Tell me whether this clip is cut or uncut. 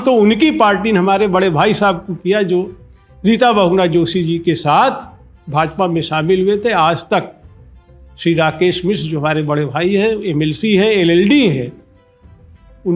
uncut